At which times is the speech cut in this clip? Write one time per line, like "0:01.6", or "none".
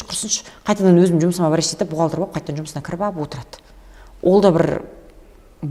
none

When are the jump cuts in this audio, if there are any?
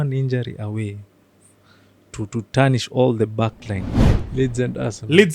0:04.0

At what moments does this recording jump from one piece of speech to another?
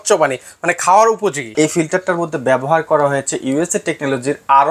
0:01.5

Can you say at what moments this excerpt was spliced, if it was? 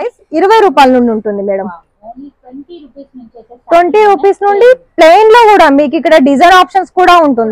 none

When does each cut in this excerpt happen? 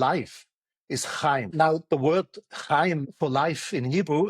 0:01.5
0:03.1

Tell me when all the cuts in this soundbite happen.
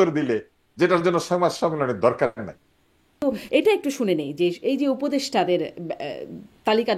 0:03.2

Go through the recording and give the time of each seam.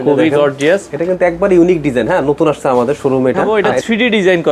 0:00.9
0:03.4

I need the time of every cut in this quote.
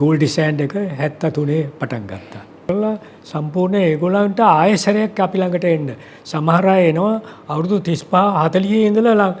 0:02.7

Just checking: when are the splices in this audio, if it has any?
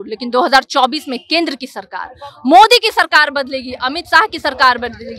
none

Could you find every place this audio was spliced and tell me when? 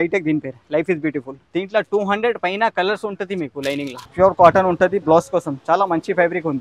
0:01.4
0:04.0

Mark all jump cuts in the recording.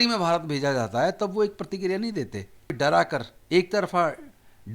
0:02.7

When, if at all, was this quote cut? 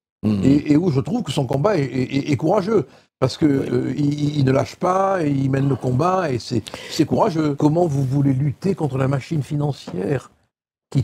0:07.6

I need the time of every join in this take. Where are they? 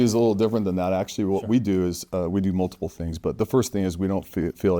none

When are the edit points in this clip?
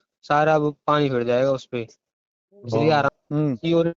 0:03.1

